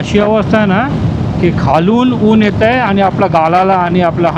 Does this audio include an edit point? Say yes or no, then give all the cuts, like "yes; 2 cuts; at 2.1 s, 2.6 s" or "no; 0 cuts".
no; 0 cuts